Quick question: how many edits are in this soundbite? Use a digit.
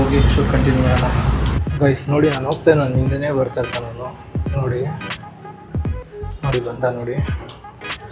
1